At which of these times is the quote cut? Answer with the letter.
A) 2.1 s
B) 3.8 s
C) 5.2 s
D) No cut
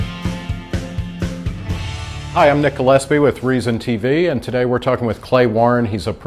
A